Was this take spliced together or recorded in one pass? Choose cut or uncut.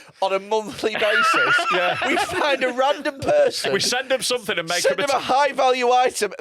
uncut